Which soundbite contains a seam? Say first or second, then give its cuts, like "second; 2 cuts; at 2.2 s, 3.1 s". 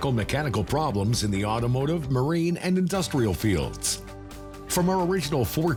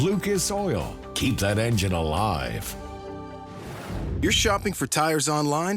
second; 1 cut; at 4.2 s